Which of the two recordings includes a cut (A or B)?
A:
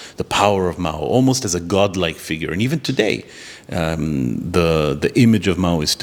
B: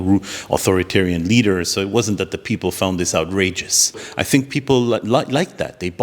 B